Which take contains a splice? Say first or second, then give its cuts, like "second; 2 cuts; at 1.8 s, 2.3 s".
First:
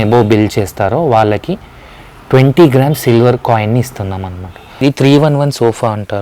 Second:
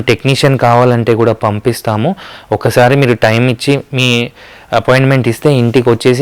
first; 1 cut; at 4.8 s